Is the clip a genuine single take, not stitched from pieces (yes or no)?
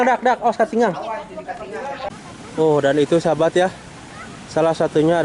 no